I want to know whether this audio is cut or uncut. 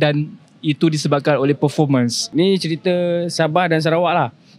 cut